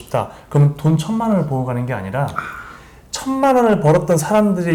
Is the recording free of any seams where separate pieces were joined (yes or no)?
yes